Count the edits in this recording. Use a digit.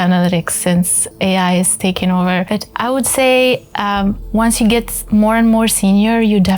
1